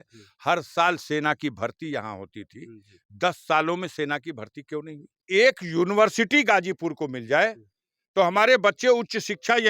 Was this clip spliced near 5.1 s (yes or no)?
yes